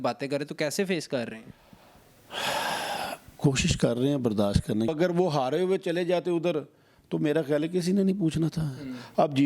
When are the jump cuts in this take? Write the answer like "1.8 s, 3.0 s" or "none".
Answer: 4.9 s